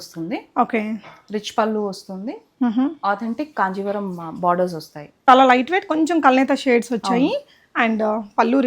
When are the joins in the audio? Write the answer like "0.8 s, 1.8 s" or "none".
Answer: 5.1 s